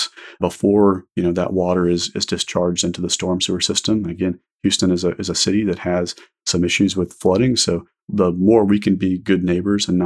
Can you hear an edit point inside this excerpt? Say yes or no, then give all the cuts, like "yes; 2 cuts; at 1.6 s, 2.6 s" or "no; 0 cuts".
no; 0 cuts